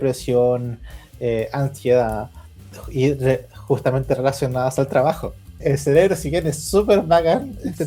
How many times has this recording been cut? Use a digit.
1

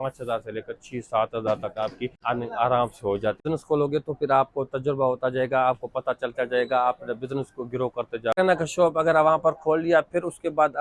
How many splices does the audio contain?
3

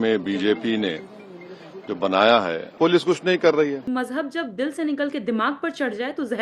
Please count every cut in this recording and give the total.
1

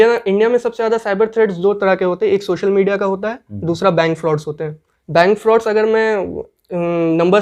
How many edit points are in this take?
0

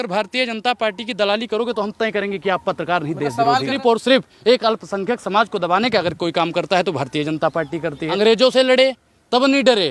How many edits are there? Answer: 2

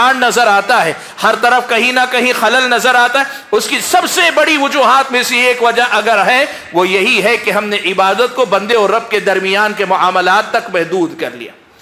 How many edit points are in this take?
0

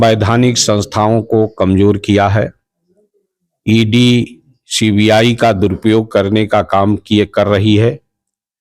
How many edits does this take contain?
0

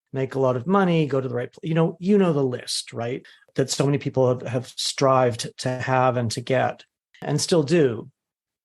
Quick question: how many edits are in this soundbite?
2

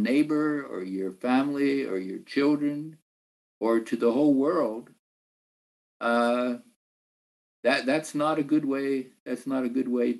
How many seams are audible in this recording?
0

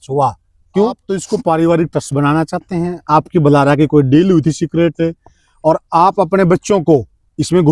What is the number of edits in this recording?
1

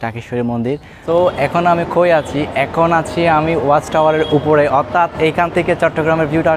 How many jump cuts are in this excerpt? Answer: 1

